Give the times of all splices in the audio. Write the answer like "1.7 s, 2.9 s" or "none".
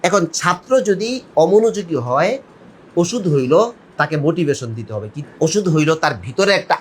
5.2 s